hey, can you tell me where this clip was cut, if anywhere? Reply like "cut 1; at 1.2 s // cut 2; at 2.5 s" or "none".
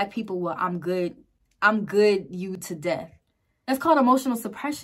cut 1; at 3.7 s